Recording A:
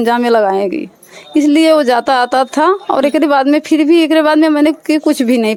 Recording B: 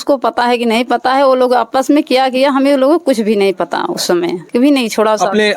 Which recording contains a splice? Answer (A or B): B